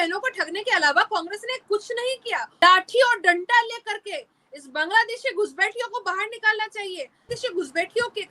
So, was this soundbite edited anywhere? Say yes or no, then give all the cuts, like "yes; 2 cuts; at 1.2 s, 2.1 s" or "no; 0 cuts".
yes; 2 cuts; at 2.6 s, 7.3 s